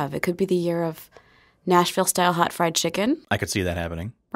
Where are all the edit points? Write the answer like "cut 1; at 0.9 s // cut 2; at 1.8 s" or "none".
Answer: cut 1; at 3.2 s